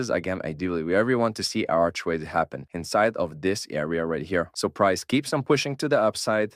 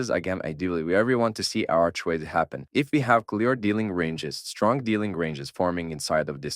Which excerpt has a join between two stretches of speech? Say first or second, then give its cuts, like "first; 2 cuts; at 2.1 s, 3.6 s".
second; 1 cut; at 2.6 s